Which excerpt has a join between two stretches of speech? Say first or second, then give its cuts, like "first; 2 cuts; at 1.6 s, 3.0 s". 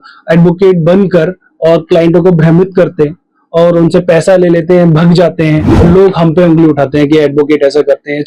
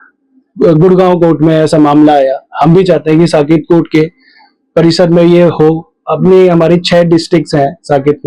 first; 1 cut; at 5.8 s